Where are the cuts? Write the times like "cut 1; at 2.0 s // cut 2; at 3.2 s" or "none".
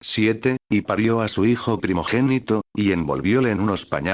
cut 1; at 2.7 s